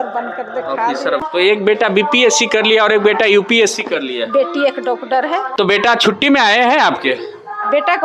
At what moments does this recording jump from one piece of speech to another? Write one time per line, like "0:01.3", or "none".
0:01.3
0:05.5

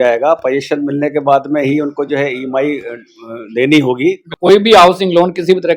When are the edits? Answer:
0:04.3

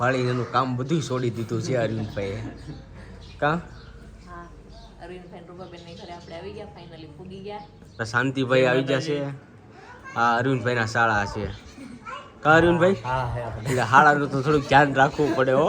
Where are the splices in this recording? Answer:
0:08.1

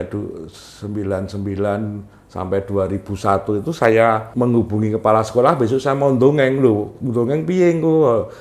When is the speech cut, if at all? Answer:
0:04.3

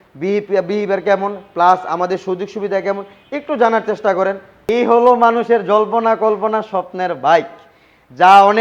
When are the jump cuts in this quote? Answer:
0:04.5

